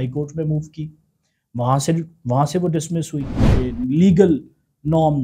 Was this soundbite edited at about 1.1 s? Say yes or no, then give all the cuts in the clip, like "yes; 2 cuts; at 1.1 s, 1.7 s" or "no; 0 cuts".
no; 1 cut; at 3.5 s